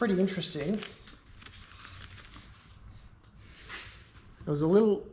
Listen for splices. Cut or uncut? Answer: uncut